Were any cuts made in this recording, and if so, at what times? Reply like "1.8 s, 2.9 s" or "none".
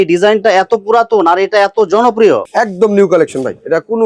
2.5 s